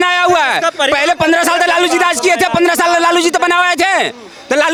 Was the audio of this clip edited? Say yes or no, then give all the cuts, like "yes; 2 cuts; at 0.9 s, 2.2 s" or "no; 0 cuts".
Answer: no; 0 cuts